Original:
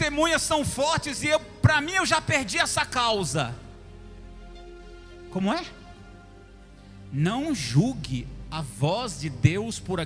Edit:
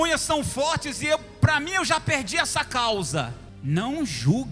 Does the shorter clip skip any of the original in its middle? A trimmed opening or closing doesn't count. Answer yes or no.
yes